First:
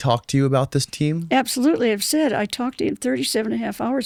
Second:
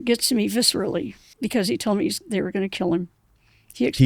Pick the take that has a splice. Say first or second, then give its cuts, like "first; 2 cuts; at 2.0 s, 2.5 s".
second; 1 cut; at 1.2 s